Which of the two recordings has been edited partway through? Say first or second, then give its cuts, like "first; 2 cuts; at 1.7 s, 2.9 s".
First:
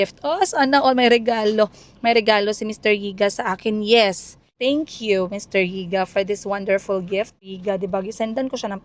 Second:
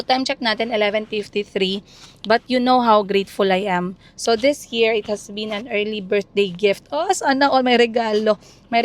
first; 2 cuts; at 4.5 s, 7.5 s